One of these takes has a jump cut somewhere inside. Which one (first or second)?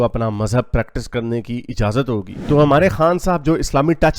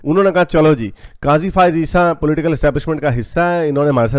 first